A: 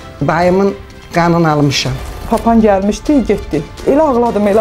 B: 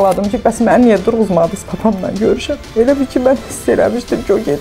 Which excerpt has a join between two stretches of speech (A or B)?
A